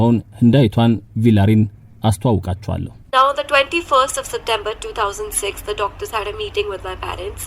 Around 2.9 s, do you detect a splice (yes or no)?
yes